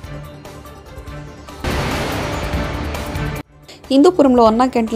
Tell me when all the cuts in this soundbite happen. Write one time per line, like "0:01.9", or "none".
0:01.6
0:03.6